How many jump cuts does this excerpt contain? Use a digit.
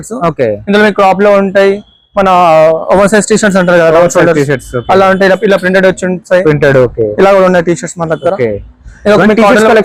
0